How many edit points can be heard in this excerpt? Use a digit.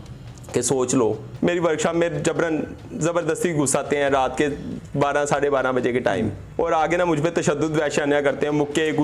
2